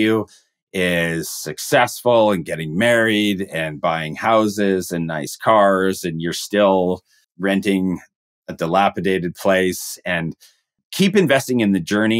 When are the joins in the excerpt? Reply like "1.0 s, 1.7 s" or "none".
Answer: 7.2 s, 10.8 s